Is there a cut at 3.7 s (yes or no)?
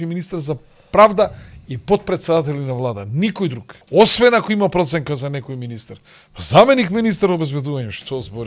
yes